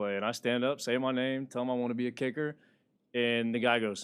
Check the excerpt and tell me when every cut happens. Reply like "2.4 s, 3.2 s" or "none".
none